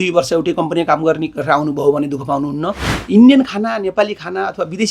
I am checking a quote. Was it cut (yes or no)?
yes